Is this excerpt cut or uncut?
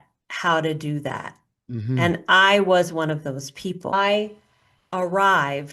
cut